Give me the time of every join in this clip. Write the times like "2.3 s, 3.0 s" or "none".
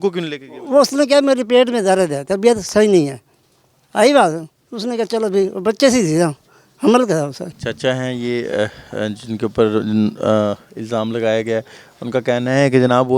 none